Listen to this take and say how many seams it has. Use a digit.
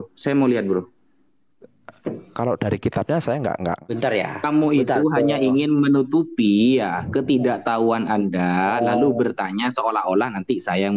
1